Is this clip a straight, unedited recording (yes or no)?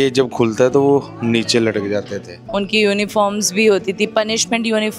no